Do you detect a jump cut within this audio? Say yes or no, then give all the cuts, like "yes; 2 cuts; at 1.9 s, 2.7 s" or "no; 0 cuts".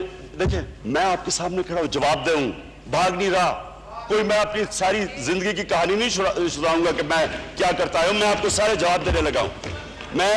no; 0 cuts